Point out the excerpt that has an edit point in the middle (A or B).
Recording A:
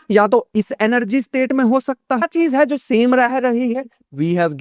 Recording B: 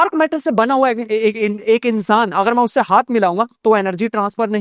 A